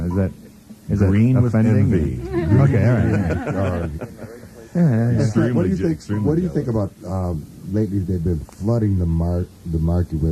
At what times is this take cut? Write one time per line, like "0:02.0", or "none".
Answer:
none